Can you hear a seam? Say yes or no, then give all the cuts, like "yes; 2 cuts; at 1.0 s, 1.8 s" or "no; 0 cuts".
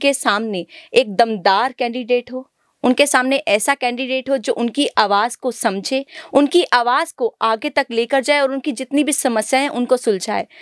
no; 0 cuts